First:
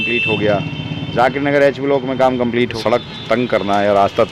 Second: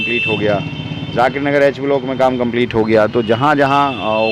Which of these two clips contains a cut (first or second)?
first